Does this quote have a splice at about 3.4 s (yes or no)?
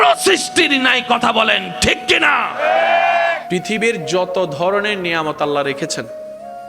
yes